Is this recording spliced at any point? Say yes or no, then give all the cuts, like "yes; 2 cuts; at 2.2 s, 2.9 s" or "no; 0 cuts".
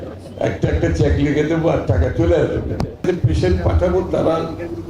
yes; 1 cut; at 3.0 s